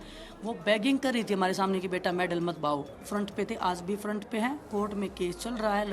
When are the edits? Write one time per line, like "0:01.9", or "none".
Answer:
0:03.0